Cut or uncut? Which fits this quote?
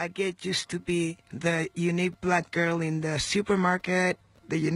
cut